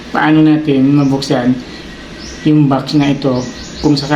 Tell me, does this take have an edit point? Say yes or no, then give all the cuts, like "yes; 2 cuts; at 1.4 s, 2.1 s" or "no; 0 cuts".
no; 0 cuts